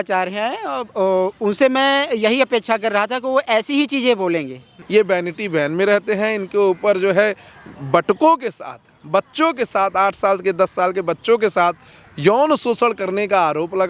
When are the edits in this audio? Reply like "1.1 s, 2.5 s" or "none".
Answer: 4.7 s